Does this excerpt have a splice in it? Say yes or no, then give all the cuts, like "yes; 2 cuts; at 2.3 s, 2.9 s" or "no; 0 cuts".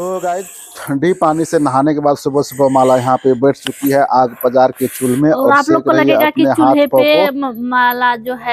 no; 0 cuts